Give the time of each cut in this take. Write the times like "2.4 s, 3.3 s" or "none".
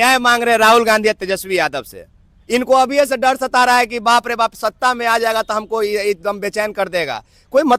none